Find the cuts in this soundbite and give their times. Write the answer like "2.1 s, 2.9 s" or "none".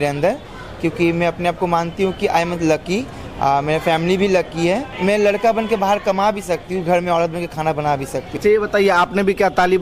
4.9 s, 8.3 s